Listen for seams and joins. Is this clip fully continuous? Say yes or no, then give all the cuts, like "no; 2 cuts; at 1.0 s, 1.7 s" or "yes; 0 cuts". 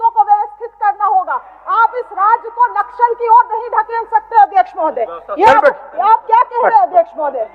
yes; 0 cuts